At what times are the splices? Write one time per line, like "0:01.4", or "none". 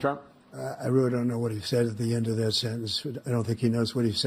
none